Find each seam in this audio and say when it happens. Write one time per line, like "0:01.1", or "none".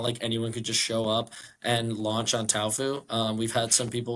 none